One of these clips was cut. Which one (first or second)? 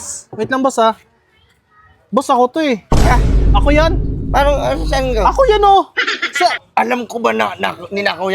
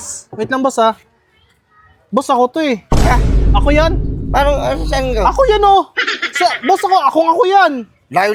first